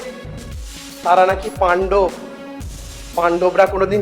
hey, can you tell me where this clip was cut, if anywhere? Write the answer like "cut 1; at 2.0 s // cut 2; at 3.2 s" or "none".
none